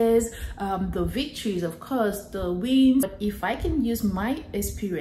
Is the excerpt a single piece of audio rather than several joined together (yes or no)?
no